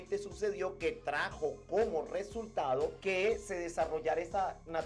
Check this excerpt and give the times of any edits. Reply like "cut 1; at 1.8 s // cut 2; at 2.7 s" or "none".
cut 1; at 3.0 s